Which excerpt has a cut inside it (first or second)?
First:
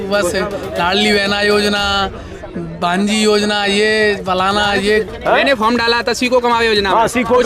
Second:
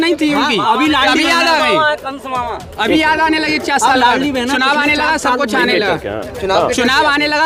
first